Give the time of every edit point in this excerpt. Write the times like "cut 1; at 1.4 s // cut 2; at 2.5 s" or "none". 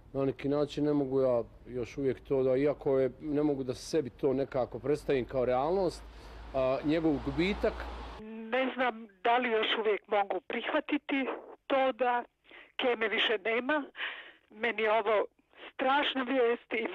cut 1; at 9.8 s